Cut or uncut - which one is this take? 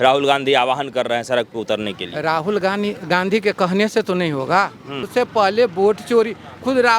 cut